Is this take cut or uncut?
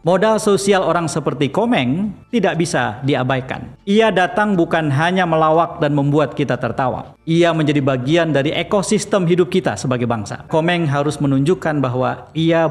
cut